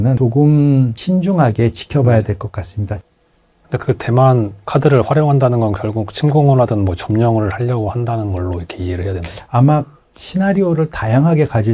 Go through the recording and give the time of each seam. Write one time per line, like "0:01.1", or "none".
none